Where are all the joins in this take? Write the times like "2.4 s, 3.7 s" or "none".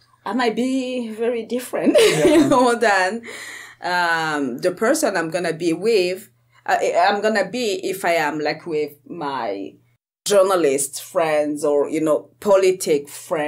none